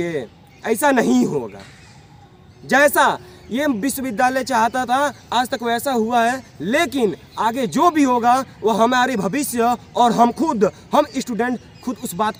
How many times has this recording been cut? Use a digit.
0